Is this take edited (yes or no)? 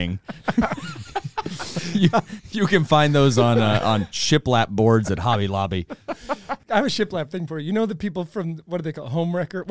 yes